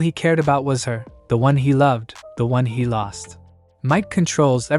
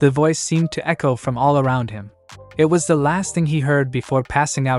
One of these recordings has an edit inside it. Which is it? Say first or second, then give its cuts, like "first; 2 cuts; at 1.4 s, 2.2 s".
first; 1 cut; at 3.7 s